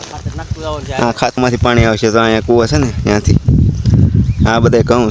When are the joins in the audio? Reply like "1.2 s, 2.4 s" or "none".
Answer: 1.4 s